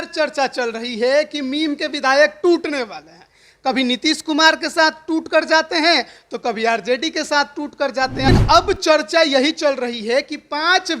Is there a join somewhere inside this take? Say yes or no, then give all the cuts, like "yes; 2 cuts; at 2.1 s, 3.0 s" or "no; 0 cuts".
yes; 1 cut; at 8.3 s